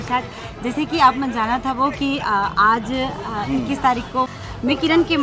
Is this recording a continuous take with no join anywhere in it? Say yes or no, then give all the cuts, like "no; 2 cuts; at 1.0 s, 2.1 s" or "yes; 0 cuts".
no; 1 cut; at 4.3 s